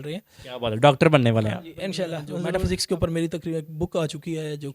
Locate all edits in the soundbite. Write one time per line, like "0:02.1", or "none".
0:02.3